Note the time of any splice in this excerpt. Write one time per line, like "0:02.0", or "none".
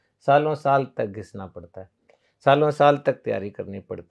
none